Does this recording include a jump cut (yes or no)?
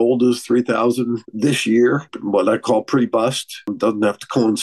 yes